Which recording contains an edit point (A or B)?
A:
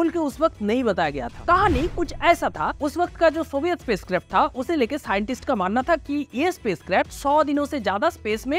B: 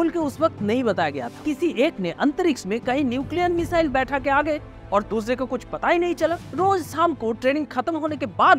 B